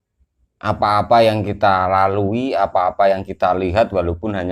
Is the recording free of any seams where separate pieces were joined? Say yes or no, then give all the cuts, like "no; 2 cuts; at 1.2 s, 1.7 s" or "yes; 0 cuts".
yes; 0 cuts